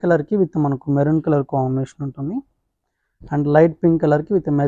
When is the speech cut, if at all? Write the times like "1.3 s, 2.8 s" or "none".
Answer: none